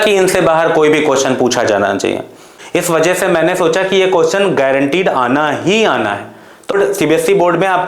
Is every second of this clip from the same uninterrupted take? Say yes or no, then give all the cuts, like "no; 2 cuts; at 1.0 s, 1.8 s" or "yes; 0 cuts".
no; 2 cuts; at 2.5 s, 6.8 s